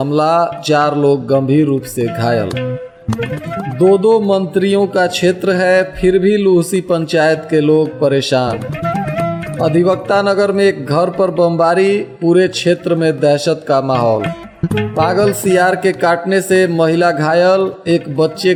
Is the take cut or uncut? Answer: uncut